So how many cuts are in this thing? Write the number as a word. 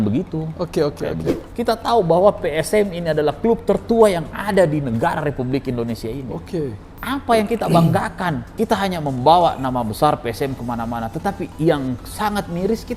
three